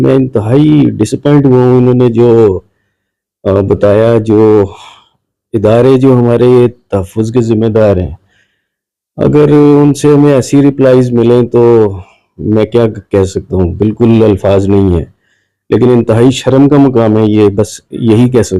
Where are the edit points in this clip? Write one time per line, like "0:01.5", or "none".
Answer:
none